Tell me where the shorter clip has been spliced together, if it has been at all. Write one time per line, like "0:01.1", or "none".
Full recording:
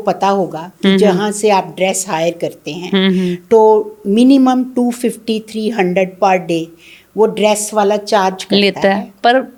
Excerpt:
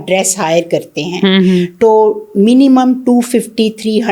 none